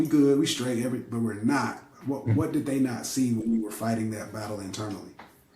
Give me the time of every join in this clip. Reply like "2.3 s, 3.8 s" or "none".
none